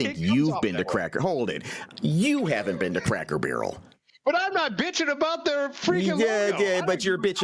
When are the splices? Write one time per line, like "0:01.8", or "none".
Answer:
none